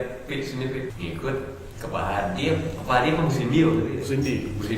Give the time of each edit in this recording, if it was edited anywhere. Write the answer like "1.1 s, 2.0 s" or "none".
0.9 s